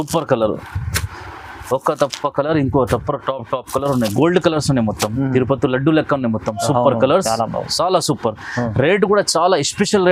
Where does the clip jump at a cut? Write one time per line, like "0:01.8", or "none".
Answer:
none